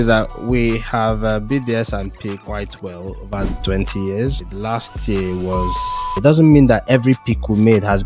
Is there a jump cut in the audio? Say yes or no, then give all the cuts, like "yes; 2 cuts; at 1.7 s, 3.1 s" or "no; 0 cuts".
yes; 2 cuts; at 4.5 s, 6.1 s